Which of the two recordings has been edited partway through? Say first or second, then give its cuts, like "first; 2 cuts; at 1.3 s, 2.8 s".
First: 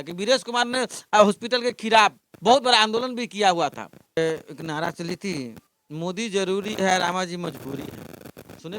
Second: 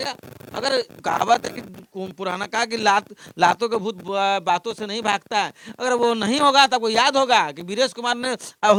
first; 1 cut; at 4.2 s